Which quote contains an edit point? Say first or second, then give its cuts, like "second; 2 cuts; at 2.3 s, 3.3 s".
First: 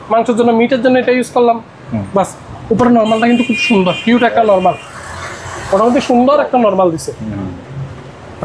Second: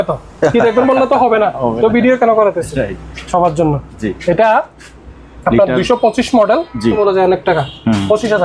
second; 1 cut; at 7.0 s